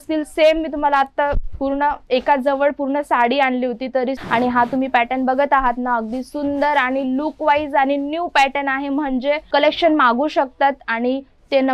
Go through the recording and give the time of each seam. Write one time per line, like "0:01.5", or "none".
0:04.2
0:09.4